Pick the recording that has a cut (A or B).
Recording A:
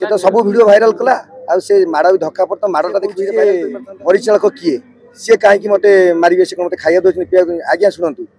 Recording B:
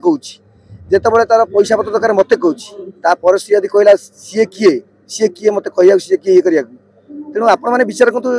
A